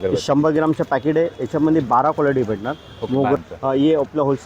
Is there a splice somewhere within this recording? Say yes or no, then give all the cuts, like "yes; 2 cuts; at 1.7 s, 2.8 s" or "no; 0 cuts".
yes; 1 cut; at 3.4 s